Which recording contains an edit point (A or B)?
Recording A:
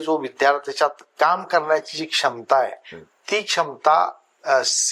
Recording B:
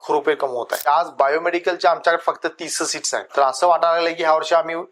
B